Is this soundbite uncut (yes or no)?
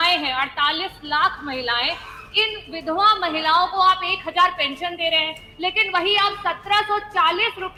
yes